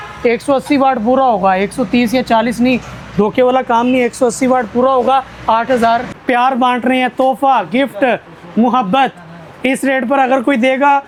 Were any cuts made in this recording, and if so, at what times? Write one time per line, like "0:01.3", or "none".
none